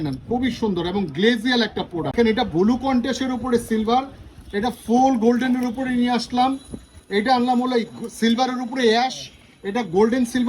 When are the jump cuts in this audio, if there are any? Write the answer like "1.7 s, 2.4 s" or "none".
2.1 s